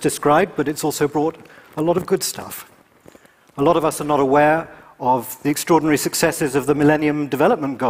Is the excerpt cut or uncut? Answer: cut